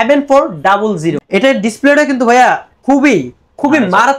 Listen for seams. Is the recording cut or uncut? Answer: cut